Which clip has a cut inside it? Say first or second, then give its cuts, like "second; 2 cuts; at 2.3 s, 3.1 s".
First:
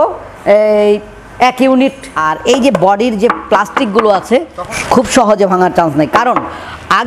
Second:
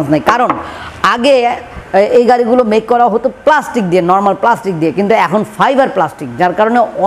first; 2 cuts; at 2.1 s, 4.6 s